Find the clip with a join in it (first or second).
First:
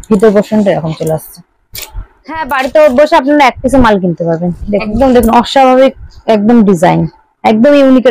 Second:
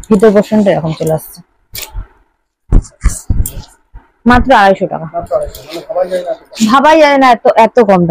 first